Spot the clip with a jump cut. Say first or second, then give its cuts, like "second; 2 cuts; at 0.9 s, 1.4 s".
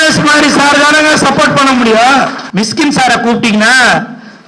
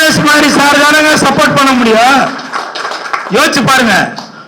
first; 1 cut; at 2.4 s